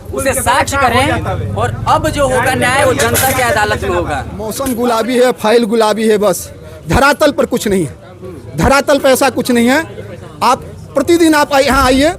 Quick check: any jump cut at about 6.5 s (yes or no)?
no